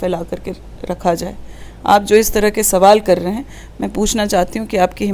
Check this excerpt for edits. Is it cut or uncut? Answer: uncut